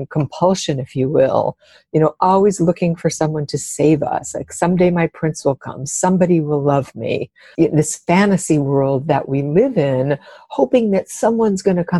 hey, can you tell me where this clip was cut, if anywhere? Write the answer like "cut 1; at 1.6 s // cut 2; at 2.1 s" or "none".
cut 1; at 7.4 s